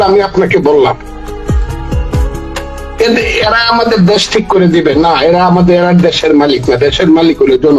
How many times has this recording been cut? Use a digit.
0